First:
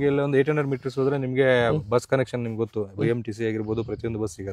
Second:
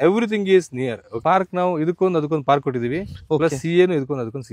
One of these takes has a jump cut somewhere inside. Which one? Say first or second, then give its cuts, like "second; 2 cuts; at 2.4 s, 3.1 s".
second; 1 cut; at 1.1 s